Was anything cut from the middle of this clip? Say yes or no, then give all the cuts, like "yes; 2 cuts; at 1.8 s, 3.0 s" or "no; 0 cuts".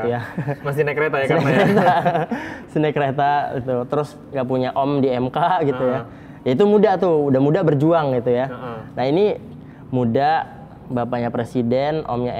no; 0 cuts